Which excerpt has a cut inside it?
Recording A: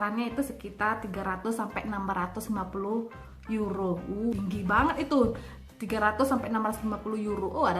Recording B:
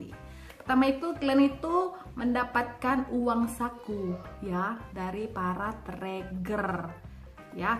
A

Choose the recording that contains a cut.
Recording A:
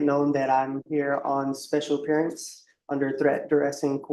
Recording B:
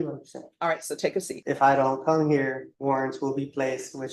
B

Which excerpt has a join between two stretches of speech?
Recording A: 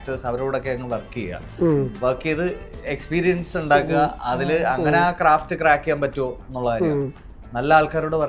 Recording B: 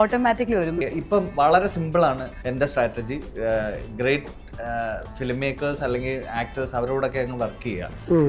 B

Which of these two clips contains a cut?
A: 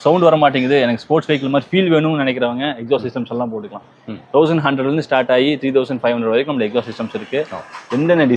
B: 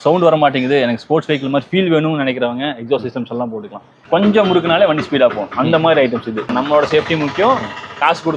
B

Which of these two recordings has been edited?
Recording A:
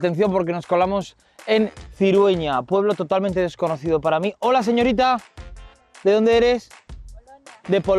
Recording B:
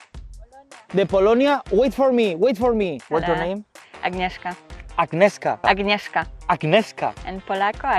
B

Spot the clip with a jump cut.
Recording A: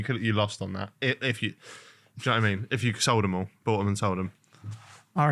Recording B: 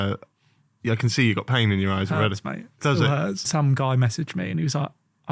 B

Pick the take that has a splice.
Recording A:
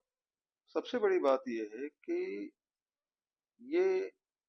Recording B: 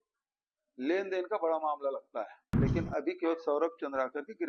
B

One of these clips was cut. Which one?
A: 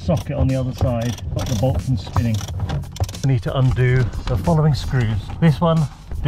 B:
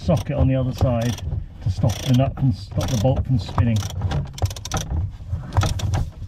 A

